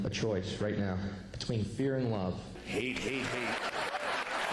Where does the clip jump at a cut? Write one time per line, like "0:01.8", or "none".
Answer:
0:02.6